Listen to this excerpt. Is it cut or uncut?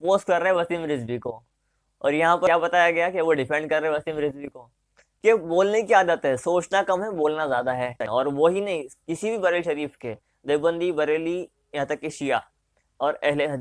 cut